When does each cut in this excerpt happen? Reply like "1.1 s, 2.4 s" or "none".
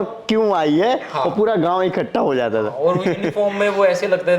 none